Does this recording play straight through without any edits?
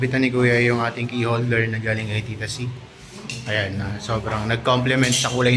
yes; 0 cuts

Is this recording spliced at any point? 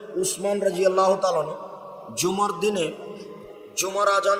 no; 0 cuts

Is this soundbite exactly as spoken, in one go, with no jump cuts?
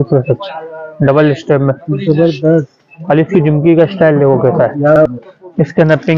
no; 1 cut; at 5.0 s

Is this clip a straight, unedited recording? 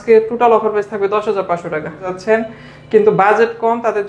no; 1 cut; at 2.0 s

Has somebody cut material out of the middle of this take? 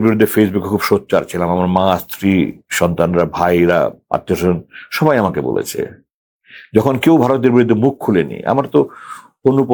no; 0 cuts

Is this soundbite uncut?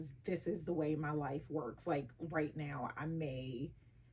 yes; 0 cuts

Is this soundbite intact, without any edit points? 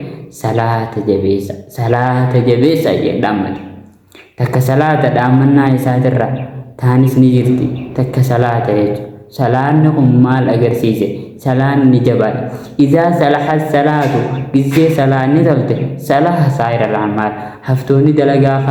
yes; 0 cuts

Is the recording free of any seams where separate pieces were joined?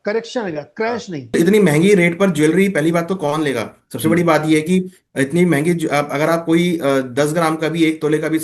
no; 1 cut; at 1.3 s

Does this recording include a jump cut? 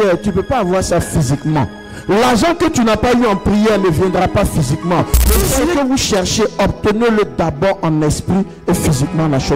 yes; 1 cut; at 5.2 s

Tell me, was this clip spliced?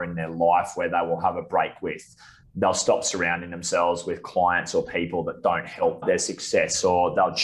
yes; 1 cut; at 6.0 s

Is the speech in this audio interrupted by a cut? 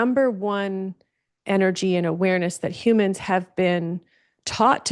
no; 0 cuts

